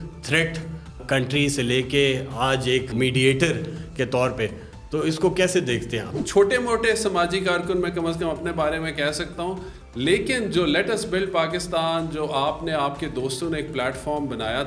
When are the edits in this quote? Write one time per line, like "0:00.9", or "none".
0:01.0
0:02.9
0:06.1